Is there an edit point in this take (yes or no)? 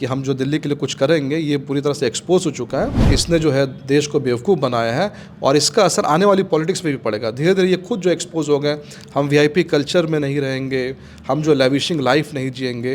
yes